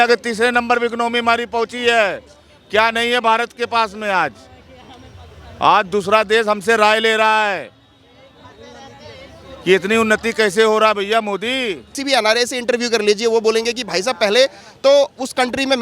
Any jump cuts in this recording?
yes; 1 cut; at 11.9 s

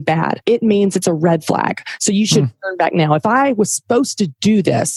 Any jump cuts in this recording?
no; 0 cuts

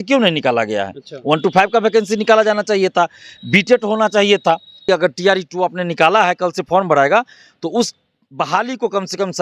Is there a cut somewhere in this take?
yes; 1 cut; at 4.8 s

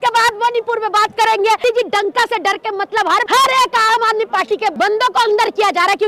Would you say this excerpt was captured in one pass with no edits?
no; 3 cuts; at 1.6 s, 3.2 s, 4.7 s

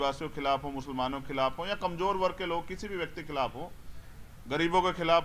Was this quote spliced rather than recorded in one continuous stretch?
no; 0 cuts

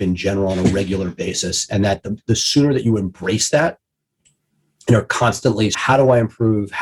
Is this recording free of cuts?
no; 1 cut; at 5.8 s

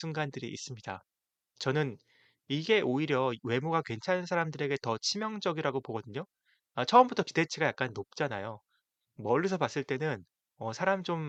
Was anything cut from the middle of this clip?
no; 0 cuts

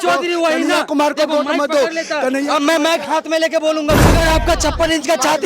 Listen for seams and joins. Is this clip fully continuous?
no; 1 cut; at 4.1 s

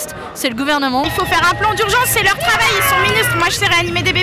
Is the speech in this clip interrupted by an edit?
yes; 1 cut; at 1.0 s

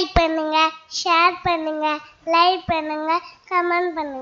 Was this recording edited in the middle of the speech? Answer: no; 0 cuts

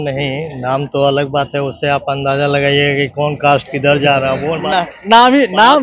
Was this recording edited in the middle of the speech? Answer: no; 0 cuts

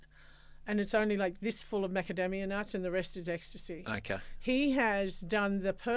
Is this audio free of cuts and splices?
yes; 0 cuts

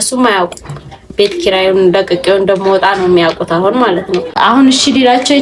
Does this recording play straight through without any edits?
no; 1 cut; at 4.3 s

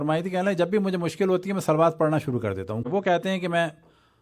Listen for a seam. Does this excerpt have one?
yes; 1 cut; at 2.9 s

